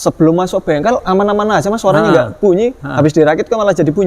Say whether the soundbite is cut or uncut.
uncut